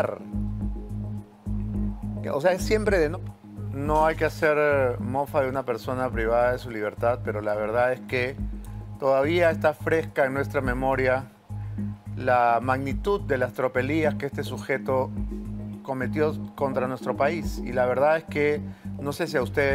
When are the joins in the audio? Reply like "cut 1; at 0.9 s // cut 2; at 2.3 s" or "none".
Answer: cut 1; at 3.1 s